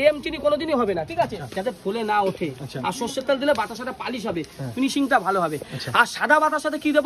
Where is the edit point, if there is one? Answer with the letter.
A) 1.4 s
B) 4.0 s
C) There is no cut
A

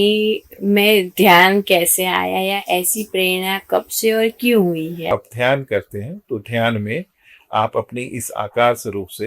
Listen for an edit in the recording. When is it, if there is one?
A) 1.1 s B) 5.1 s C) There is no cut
B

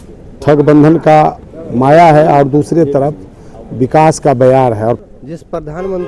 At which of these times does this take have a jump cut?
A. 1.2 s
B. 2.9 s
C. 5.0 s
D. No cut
C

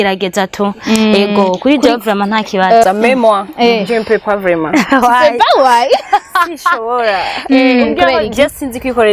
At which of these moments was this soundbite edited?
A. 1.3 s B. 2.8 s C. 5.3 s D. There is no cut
B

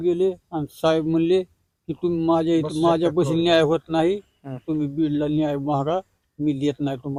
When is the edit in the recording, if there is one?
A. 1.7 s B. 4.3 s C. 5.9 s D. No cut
D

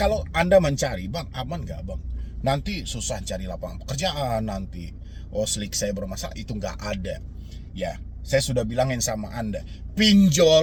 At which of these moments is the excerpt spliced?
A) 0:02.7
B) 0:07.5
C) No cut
C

